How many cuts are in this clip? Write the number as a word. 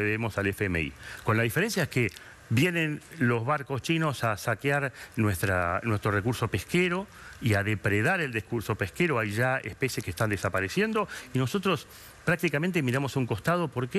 zero